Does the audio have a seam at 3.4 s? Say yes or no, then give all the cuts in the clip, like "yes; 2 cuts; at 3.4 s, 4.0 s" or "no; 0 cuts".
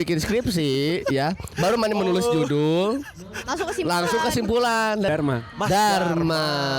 no; 1 cut; at 5.1 s